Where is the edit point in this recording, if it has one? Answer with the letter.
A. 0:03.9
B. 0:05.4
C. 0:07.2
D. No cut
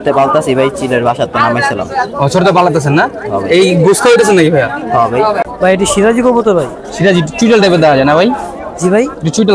B